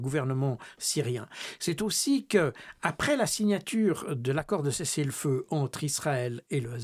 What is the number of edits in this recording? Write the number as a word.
zero